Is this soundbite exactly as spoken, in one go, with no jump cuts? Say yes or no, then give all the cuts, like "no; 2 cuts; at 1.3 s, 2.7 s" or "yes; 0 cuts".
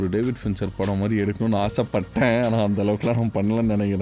yes; 0 cuts